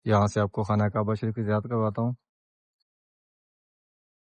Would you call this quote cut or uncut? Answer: uncut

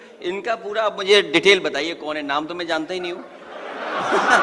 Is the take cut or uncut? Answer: uncut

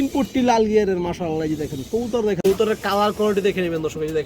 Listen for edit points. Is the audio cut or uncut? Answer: cut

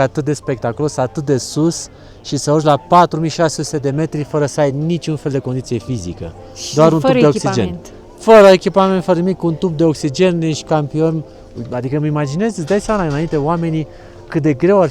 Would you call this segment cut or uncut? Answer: uncut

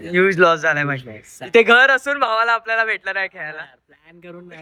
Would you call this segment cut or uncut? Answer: uncut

